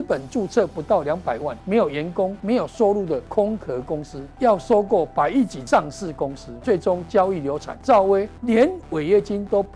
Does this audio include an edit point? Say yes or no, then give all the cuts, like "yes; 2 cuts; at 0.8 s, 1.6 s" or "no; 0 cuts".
yes; 8 cuts; at 1.5 s, 2.4 s, 3.3 s, 4.2 s, 5.6 s, 6.5 s, 7.7 s, 8.3 s